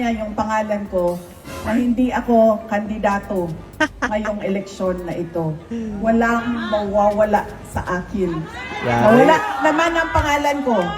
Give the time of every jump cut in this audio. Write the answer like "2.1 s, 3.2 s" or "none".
none